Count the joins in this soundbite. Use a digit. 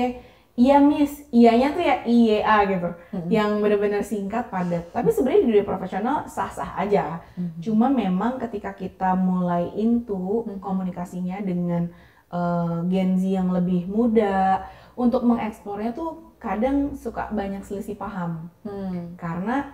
0